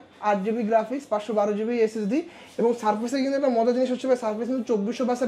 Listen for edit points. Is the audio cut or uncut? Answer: uncut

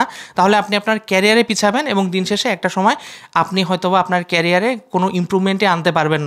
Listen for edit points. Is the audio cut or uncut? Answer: uncut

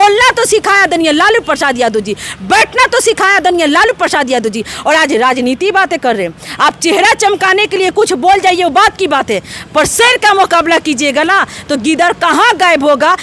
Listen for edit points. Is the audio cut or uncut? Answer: uncut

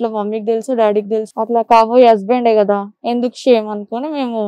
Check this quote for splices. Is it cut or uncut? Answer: cut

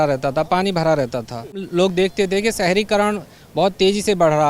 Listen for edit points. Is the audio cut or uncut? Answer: cut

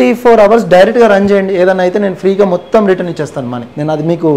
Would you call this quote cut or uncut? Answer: uncut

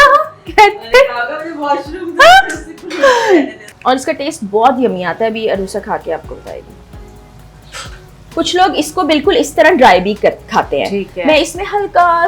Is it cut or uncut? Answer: cut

